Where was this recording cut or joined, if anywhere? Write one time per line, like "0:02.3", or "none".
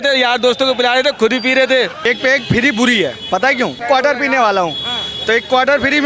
0:02.1
0:03.8